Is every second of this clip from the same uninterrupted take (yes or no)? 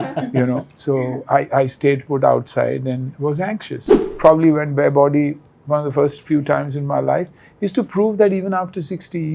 no